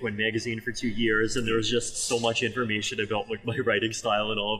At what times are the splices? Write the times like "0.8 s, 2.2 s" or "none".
none